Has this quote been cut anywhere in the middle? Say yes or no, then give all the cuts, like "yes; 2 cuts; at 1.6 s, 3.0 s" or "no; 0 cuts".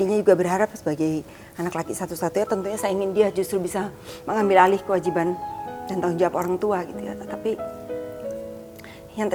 no; 0 cuts